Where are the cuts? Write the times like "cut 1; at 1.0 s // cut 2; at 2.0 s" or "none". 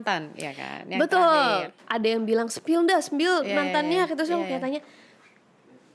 cut 1; at 1.8 s